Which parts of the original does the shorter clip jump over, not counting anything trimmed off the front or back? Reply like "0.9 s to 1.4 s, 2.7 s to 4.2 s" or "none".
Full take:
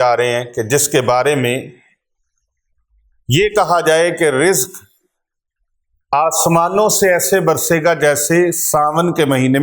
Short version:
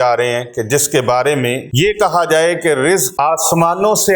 1.7 s to 3.2 s, 4.6 s to 6.0 s